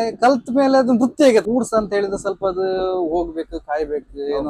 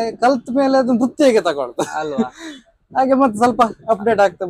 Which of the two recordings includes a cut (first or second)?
first